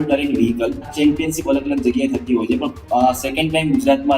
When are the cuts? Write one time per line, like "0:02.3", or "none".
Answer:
0:00.9